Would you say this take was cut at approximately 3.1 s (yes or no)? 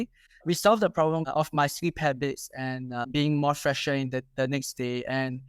yes